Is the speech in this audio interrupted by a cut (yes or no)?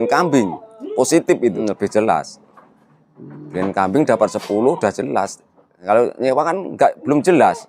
yes